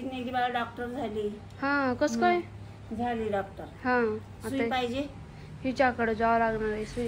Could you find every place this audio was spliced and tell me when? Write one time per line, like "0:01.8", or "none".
none